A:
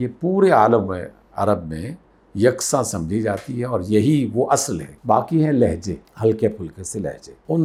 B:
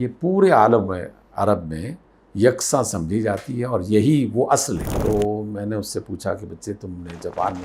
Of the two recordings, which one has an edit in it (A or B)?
B